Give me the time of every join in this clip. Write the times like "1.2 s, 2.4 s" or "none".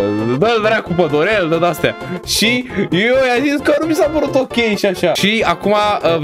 5.2 s